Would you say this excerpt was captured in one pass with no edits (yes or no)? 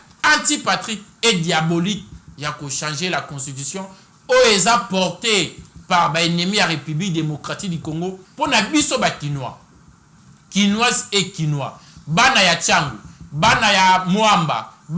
no